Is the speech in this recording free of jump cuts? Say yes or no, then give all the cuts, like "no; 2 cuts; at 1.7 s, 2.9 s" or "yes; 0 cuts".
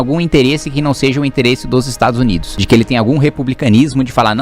no; 1 cut; at 2.5 s